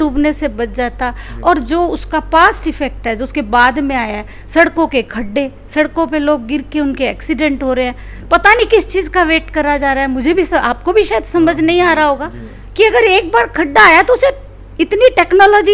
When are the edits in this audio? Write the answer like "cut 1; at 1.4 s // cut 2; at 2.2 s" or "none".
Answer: none